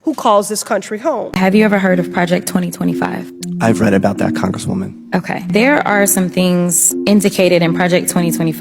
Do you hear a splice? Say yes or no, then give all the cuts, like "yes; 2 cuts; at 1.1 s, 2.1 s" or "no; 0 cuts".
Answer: yes; 1 cut; at 1.4 s